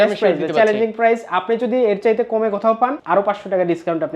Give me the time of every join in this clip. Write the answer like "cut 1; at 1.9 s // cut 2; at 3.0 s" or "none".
cut 1; at 3.0 s